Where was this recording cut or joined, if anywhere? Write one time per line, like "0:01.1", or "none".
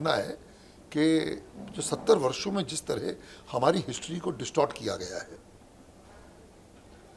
none